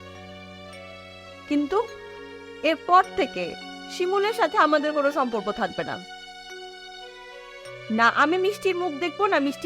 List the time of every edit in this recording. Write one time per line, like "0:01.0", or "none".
0:05.7

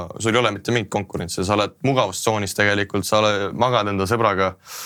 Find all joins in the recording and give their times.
none

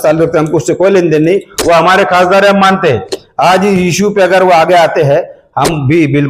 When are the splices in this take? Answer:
none

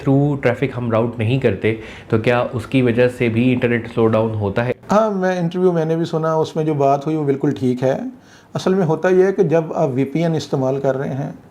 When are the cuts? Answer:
none

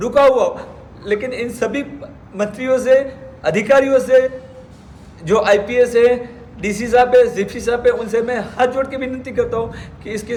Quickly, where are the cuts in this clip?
none

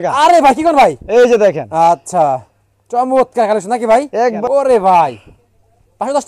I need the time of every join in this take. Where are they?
0:04.4

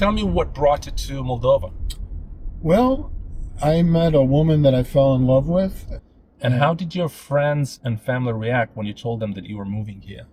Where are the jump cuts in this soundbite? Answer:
0:05.9

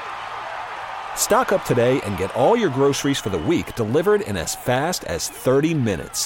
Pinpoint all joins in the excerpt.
none

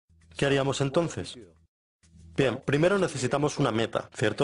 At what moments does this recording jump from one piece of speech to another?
none

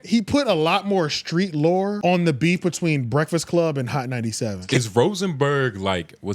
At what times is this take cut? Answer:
0:02.0
0:04.6

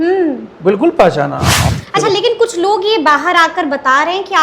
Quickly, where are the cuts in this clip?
0:01.5

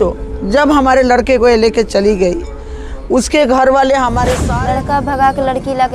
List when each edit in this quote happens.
0:04.5

